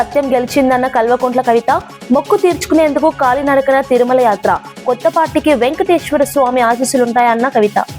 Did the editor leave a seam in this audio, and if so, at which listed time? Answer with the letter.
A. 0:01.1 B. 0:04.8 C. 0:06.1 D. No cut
D